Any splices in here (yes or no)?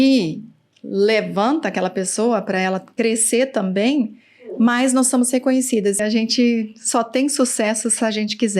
yes